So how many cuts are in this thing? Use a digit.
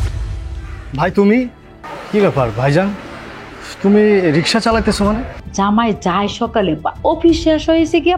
1